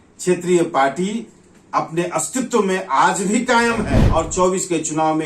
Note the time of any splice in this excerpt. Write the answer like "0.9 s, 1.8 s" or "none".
4.0 s